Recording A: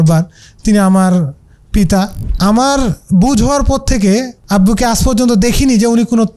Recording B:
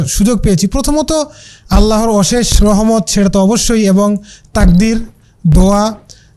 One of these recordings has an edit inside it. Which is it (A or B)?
A